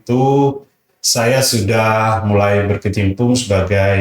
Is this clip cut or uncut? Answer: uncut